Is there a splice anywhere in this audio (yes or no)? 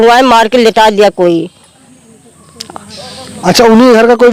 no